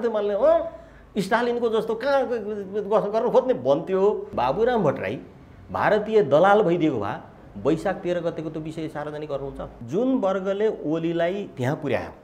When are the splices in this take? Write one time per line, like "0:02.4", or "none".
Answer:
0:04.3
0:09.7

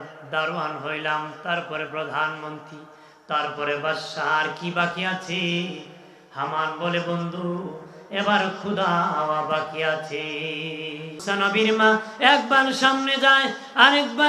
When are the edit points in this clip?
0:11.2

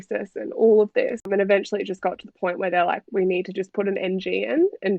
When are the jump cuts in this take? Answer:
none

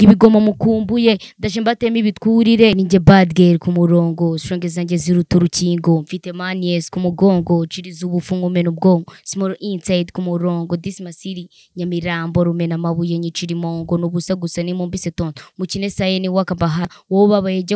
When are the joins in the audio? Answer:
0:02.7
0:16.9

